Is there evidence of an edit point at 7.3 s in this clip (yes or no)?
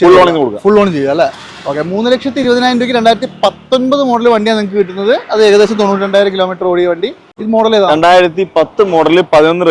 yes